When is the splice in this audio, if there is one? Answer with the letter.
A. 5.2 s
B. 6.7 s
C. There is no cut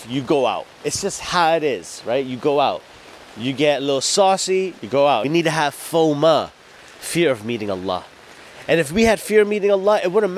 A